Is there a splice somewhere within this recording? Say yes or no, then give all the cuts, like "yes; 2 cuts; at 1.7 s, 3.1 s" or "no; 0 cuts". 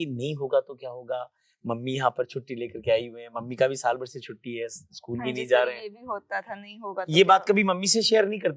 no; 0 cuts